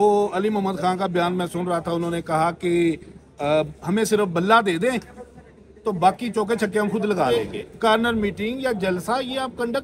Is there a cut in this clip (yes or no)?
yes